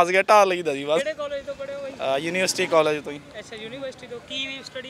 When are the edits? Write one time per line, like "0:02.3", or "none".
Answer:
none